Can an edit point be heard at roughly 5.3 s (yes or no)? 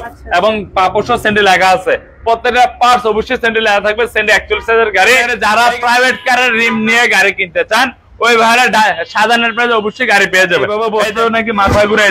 yes